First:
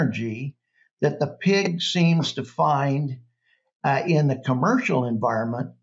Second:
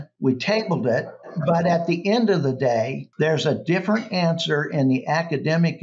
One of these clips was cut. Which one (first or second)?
second